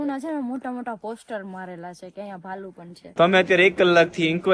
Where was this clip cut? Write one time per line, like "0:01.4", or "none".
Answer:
0:03.0